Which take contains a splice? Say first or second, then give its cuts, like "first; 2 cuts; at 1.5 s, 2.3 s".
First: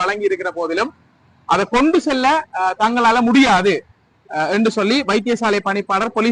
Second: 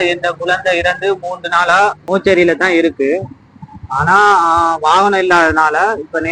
second; 1 cut; at 2.0 s